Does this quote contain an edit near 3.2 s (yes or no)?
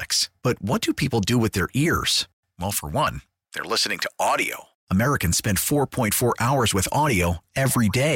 no